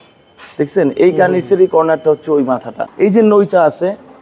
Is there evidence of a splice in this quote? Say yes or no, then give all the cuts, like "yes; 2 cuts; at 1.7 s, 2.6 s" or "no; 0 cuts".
yes; 1 cut; at 2.8 s